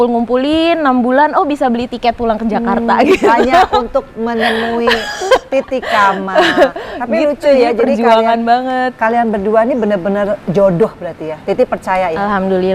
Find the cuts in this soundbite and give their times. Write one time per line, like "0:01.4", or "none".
none